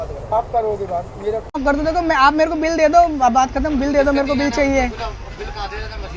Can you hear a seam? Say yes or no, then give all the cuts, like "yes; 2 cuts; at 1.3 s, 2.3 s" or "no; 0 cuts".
yes; 1 cut; at 1.6 s